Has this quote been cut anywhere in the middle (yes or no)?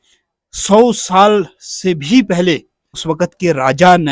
yes